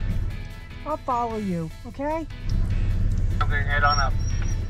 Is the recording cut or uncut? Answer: uncut